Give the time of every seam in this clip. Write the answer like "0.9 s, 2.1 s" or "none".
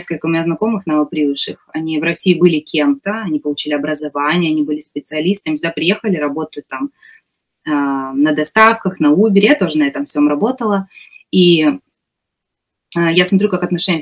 none